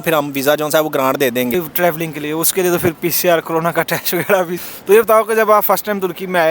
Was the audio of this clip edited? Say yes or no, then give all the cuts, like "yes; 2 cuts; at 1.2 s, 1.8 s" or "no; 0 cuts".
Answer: yes; 2 cuts; at 1.5 s, 4.6 s